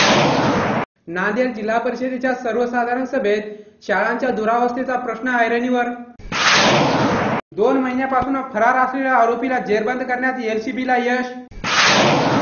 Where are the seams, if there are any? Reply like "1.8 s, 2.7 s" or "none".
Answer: 0.9 s